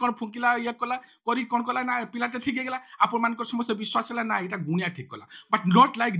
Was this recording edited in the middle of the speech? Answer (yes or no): no